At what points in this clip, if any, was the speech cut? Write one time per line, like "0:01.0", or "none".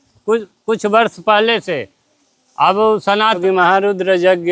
0:03.4